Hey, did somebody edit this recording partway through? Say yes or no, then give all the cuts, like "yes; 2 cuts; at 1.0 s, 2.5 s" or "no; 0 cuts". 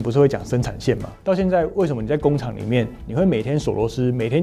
yes; 1 cut; at 1.2 s